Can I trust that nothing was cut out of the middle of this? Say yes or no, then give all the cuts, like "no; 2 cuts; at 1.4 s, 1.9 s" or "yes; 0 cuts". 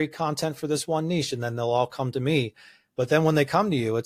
yes; 0 cuts